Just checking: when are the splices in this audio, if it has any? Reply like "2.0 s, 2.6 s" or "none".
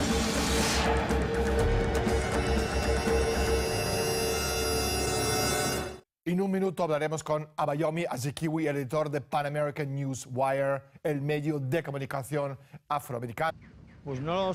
none